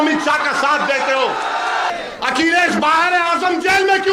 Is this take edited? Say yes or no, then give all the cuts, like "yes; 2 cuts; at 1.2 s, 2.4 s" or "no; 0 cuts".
yes; 1 cut; at 1.9 s